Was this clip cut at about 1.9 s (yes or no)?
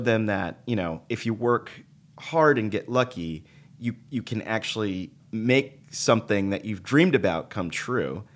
no